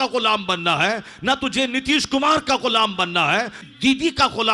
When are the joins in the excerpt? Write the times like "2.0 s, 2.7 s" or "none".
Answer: 3.6 s